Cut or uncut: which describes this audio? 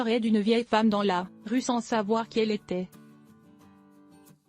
cut